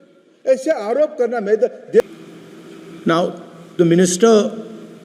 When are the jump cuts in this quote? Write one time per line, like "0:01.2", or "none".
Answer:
0:02.0